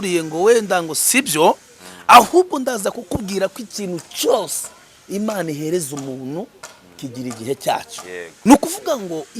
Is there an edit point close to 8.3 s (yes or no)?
yes